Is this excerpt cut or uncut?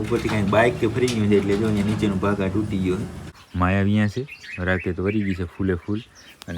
cut